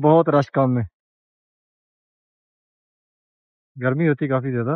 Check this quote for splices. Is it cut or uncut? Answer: uncut